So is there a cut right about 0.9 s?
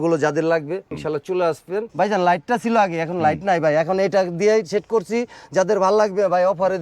yes; 2 cuts; at 0.9 s, 1.9 s

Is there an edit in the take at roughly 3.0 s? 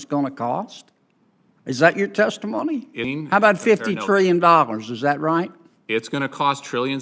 yes; 1 cut; at 3.0 s

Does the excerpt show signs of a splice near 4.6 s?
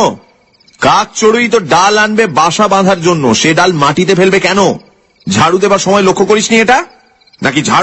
no; 0 cuts

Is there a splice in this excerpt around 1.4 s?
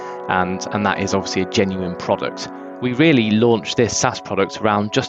no; 1 cut; at 2.6 s

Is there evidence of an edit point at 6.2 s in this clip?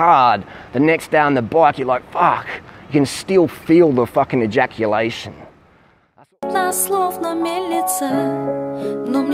yes; 1 cut; at 6.2 s

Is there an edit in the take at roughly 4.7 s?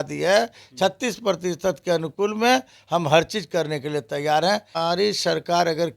yes; 1 cut; at 4.7 s

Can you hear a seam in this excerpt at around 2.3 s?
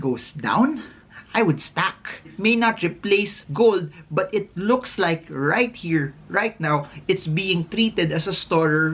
yes; 1 cut; at 2.3 s

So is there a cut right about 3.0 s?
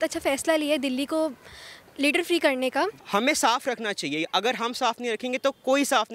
yes; 1 cut; at 3.0 s

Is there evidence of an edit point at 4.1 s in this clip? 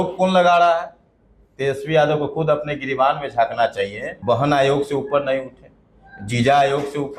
yes; 1 cut; at 4.1 s

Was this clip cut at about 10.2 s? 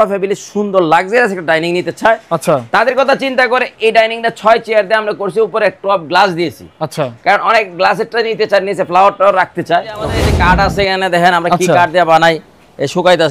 yes; 1 cut; at 10.2 s

